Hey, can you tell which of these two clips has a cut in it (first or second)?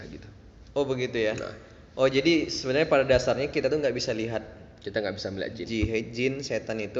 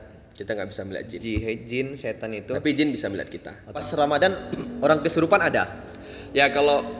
second